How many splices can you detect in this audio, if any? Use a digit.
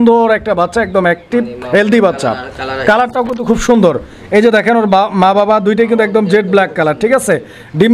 0